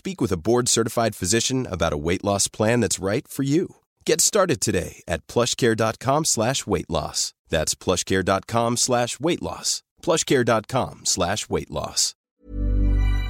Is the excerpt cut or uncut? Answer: cut